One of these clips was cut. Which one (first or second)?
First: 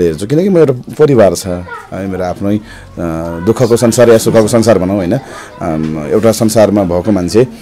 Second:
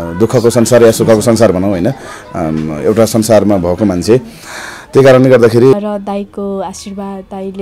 second